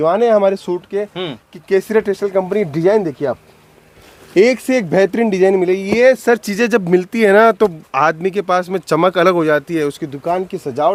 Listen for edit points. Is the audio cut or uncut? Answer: uncut